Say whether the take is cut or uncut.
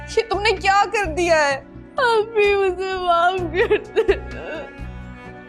uncut